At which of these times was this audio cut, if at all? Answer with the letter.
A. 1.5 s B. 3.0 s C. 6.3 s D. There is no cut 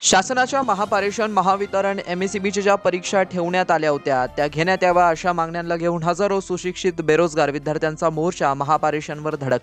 D